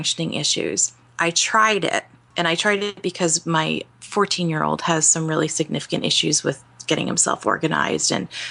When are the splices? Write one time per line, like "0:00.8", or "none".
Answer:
none